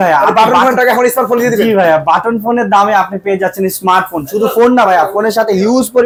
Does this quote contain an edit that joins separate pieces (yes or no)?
no